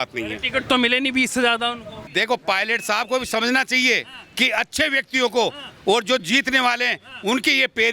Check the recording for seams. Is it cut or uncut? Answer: cut